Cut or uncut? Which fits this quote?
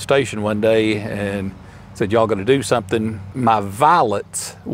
cut